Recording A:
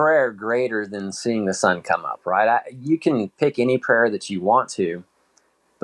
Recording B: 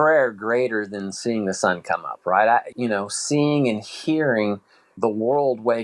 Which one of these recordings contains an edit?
B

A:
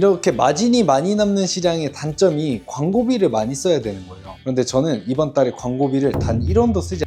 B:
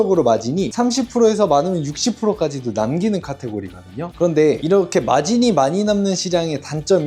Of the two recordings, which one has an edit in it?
A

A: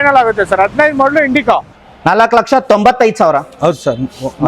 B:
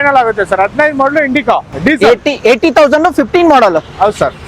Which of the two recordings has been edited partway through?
A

